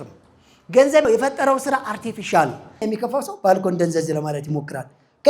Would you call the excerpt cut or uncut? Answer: cut